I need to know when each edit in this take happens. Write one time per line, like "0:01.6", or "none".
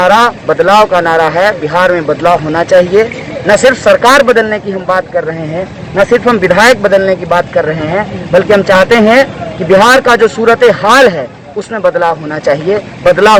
none